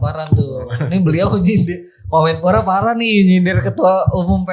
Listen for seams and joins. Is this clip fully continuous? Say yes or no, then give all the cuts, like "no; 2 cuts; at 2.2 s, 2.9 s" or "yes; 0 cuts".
yes; 0 cuts